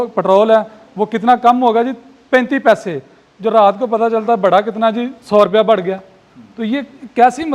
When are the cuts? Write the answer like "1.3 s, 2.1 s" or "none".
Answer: none